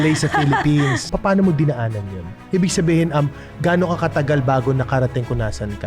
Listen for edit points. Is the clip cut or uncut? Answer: cut